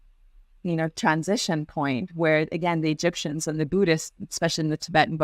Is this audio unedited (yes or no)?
yes